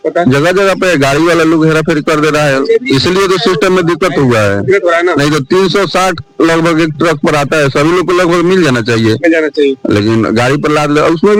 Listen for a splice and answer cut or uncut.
uncut